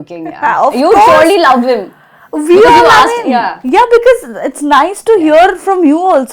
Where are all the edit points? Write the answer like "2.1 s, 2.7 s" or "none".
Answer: none